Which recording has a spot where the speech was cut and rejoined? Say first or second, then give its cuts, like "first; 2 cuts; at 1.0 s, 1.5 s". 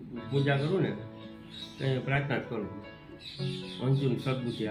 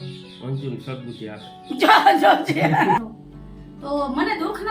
second; 1 cut; at 3.0 s